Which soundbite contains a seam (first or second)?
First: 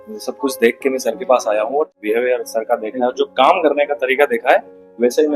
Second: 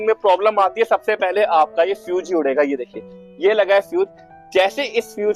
first